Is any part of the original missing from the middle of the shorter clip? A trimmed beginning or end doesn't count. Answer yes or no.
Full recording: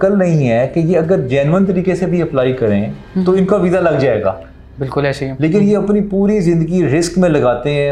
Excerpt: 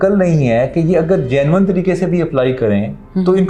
no